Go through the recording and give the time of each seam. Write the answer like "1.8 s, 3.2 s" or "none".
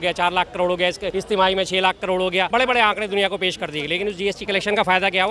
1.1 s, 2.5 s